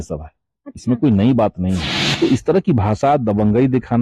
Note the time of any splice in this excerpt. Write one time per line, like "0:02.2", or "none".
0:02.0